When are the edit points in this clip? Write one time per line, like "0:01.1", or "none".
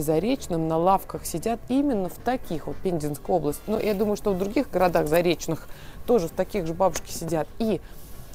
none